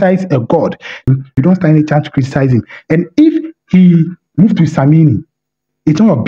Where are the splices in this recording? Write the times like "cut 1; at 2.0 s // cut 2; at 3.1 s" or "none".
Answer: cut 1; at 1.0 s

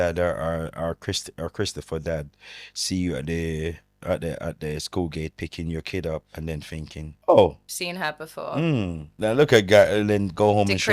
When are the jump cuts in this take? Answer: cut 1; at 7.1 s // cut 2; at 7.7 s // cut 3; at 9.0 s

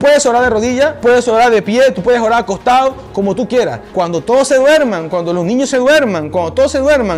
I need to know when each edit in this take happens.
cut 1; at 3.8 s

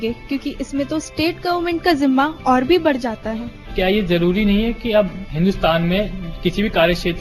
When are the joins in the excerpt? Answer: cut 1; at 3.7 s

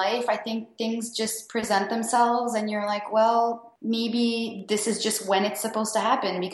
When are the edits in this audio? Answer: cut 1; at 3.7 s

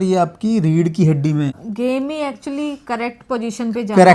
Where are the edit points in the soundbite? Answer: cut 1; at 1.6 s

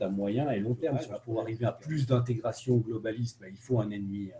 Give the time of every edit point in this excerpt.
cut 1; at 1.2 s

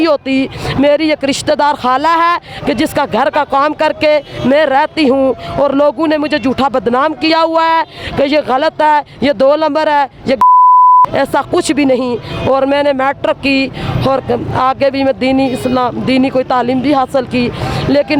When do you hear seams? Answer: none

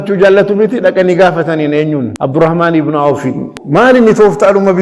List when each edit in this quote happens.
cut 1; at 2.2 s // cut 2; at 3.6 s

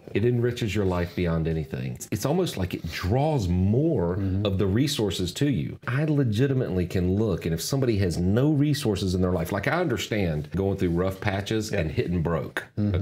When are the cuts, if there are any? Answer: cut 1; at 2.1 s // cut 2; at 5.9 s // cut 3; at 10.5 s

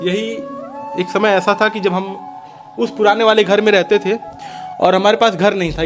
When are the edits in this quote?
none

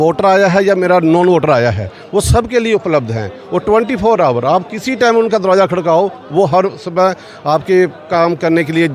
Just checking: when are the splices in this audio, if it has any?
none

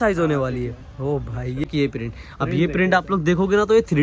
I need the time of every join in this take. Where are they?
cut 1; at 1.6 s

